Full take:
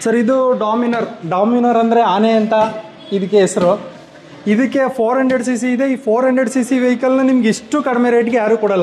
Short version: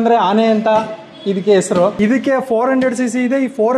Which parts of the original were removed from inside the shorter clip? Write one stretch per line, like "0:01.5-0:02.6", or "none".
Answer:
0:03.8-0:04.4